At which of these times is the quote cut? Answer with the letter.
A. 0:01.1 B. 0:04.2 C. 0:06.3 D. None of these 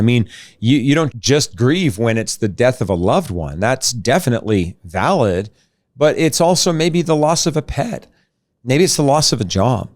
A